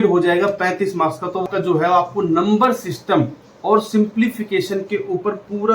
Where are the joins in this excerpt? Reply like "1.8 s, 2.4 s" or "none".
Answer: 1.5 s

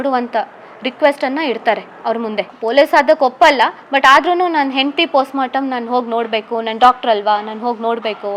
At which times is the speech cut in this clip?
none

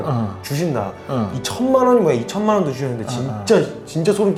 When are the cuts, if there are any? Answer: none

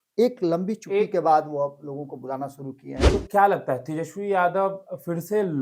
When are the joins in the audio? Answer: 3.0 s

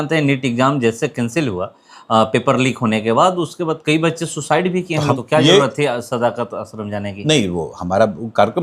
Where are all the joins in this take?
5.2 s

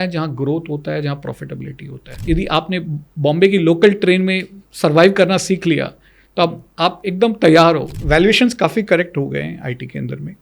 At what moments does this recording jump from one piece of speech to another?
2.2 s, 7.9 s

